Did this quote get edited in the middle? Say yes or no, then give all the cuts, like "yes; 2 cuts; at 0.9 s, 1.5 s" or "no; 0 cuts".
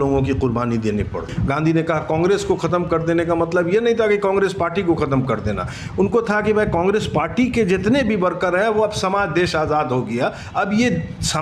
yes; 1 cut; at 1.3 s